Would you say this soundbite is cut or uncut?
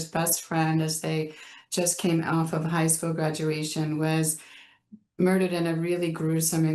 uncut